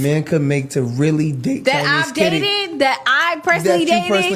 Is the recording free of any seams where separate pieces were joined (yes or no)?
yes